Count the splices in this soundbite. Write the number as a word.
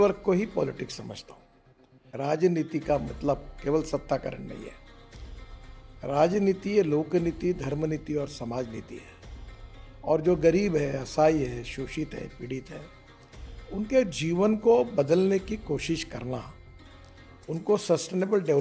zero